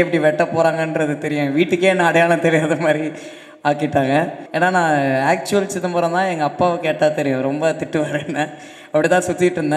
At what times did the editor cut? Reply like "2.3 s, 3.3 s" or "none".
4.4 s